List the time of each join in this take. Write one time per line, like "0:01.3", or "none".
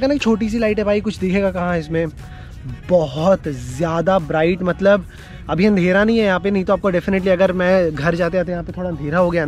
none